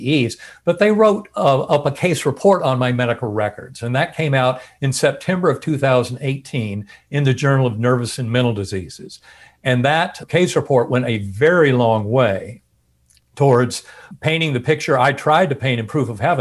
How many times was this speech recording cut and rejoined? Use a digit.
2